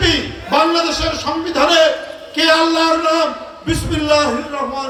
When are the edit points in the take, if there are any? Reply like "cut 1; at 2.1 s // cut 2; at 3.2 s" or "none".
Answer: none